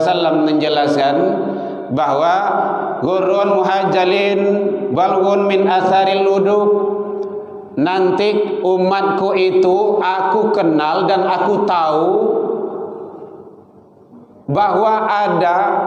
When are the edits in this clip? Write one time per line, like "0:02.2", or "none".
none